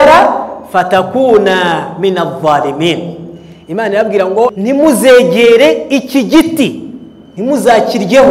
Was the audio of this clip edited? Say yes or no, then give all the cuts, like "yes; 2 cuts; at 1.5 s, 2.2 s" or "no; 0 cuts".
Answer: yes; 1 cut; at 4.6 s